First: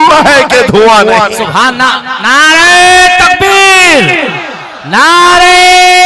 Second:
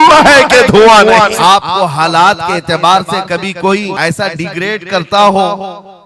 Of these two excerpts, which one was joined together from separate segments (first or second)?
second